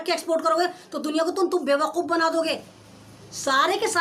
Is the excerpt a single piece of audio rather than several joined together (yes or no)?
yes